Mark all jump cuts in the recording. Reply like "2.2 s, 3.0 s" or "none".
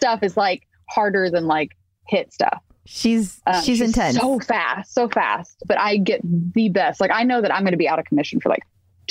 5.6 s